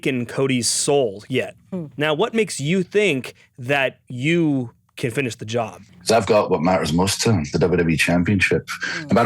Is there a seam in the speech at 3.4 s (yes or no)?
no